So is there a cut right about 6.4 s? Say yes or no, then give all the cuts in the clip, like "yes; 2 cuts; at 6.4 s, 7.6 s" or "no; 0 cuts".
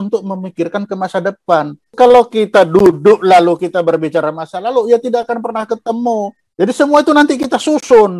yes; 2 cuts; at 1.9 s, 6.4 s